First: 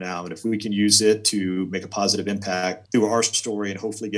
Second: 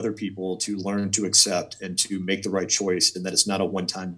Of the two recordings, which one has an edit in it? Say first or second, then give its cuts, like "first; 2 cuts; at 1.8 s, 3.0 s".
first; 1 cut; at 2.8 s